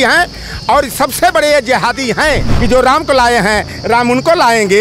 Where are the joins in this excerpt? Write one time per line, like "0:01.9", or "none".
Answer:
0:02.5